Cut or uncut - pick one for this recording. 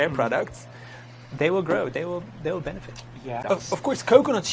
cut